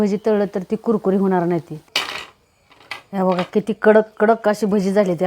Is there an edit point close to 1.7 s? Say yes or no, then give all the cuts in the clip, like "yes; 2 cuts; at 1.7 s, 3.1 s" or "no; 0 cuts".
yes; 1 cut; at 1.7 s